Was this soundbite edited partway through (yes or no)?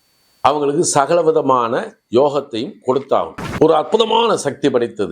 yes